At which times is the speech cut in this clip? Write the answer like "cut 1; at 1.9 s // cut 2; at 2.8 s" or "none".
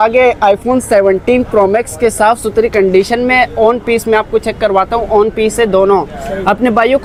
none